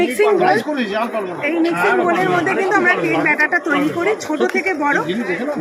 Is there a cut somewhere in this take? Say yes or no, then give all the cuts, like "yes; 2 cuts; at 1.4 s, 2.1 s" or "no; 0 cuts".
no; 0 cuts